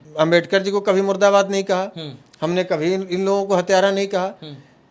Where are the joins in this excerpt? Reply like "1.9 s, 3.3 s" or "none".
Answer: none

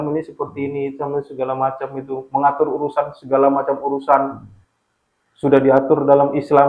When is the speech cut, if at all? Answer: none

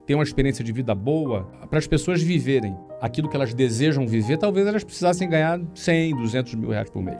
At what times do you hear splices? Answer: 1.6 s

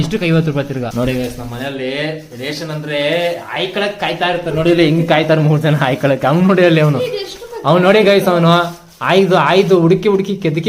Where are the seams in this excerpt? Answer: 0.9 s

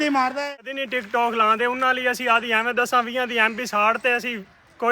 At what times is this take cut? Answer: 0.9 s

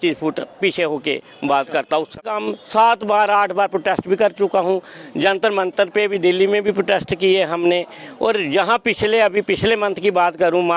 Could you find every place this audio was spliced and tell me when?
2.2 s

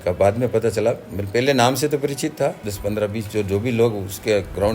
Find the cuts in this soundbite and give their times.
2.6 s

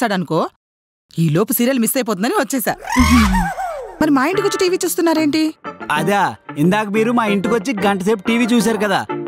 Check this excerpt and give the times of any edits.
4.0 s

